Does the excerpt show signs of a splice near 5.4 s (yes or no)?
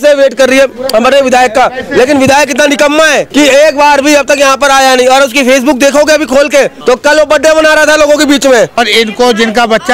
no